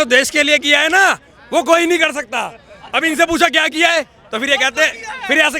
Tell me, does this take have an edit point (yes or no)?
no